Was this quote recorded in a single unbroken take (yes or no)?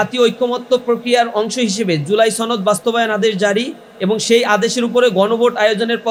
yes